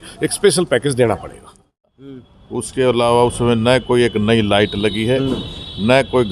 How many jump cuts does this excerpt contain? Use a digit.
1